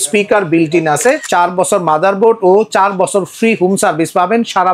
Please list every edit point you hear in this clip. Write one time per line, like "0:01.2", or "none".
0:01.2